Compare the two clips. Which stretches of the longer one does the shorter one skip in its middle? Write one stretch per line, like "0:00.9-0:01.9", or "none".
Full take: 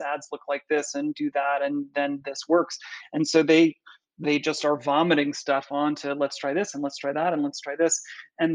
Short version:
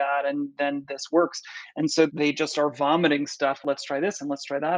0:03.5-0:04.2
0:05.7-0:06.1

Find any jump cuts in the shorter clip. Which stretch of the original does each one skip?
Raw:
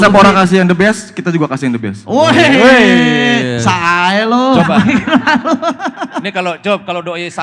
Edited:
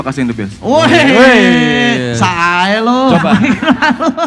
none

